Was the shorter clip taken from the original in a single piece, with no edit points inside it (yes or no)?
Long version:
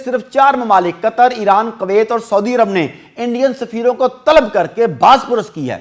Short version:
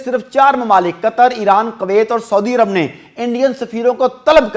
yes